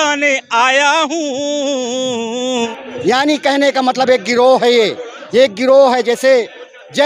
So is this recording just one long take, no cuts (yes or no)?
no